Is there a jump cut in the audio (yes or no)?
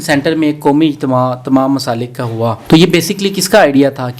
yes